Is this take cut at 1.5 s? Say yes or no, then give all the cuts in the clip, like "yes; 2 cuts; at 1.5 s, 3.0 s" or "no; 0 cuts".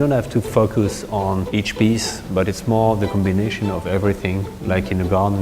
yes; 1 cut; at 1.5 s